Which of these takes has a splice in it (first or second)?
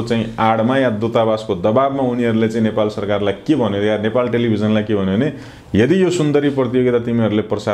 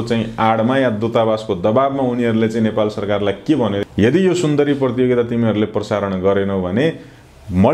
second